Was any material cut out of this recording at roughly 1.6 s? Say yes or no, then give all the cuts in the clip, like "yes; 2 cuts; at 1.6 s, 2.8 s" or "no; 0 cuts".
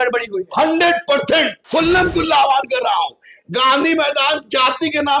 yes; 1 cut; at 1.6 s